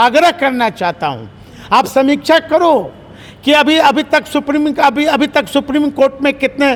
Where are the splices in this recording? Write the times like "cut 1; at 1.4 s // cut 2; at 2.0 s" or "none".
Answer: none

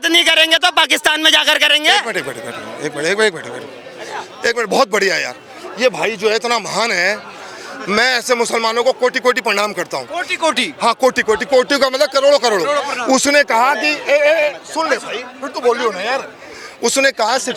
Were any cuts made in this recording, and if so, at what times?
none

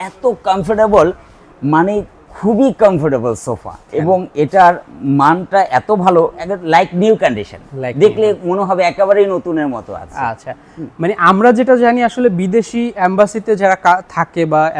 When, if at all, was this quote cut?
none

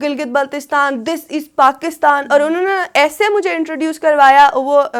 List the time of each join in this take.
none

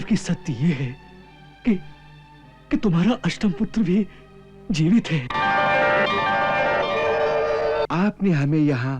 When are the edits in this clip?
cut 1; at 7.9 s

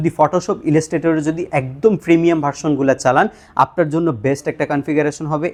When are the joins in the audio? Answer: none

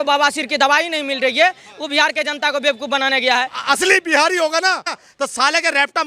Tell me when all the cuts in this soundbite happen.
cut 1; at 3.6 s // cut 2; at 5.0 s

